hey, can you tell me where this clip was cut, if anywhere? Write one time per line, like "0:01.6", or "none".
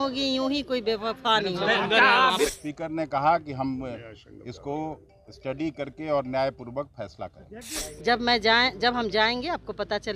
0:02.5
0:07.8